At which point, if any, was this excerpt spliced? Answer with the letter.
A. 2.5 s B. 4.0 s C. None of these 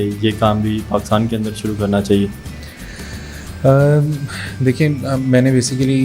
C